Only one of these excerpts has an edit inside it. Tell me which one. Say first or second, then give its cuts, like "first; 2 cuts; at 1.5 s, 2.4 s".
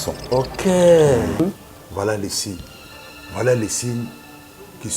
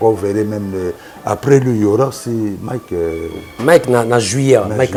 first; 1 cut; at 1.4 s